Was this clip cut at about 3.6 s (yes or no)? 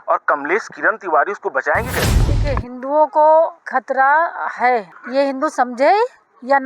yes